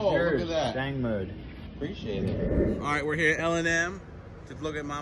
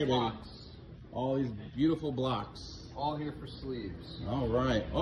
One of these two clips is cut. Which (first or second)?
first